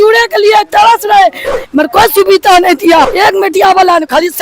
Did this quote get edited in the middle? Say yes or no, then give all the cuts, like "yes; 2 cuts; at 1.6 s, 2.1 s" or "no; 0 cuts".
yes; 2 cuts; at 1.5 s, 3.1 s